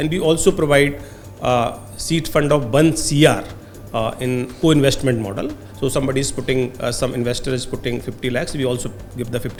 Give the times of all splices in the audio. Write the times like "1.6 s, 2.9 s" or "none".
none